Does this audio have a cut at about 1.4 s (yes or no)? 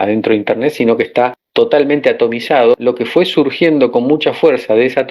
yes